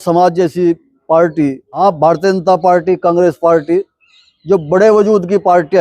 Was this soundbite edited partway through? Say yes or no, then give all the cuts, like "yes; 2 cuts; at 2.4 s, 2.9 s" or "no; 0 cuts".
yes; 1 cut; at 1.8 s